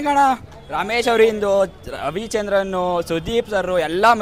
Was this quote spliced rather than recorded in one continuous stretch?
no; 0 cuts

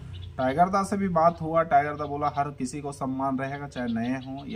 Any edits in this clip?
no; 0 cuts

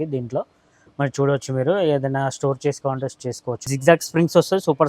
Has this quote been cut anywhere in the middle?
yes; 1 cut; at 3.7 s

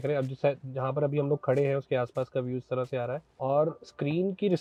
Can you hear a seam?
no; 0 cuts

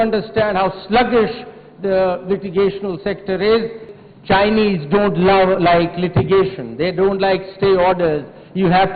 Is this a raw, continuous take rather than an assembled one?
no; 1 cut; at 3.9 s

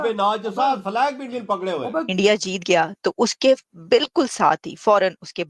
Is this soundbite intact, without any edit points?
no; 1 cut; at 2.1 s

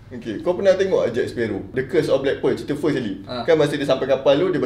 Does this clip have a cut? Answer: yes; 1 cut; at 1.7 s

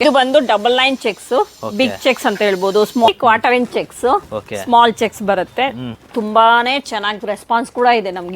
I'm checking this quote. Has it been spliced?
yes; 2 cuts; at 3.1 s, 6.0 s

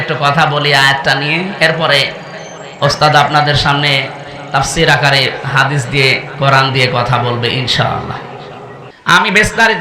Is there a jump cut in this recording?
yes; 1 cut; at 8.9 s

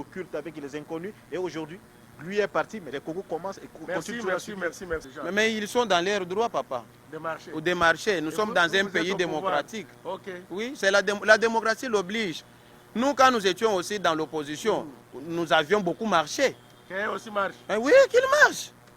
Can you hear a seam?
yes; 1 cut; at 5.1 s

